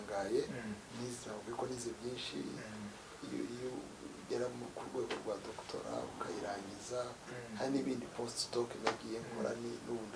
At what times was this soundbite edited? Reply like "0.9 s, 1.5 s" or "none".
none